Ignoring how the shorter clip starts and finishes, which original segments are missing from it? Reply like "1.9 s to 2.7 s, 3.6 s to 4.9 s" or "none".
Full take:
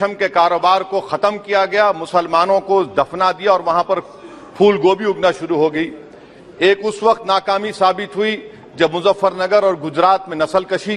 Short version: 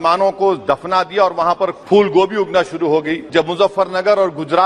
4.1 s to 4.5 s, 5.9 s to 8.7 s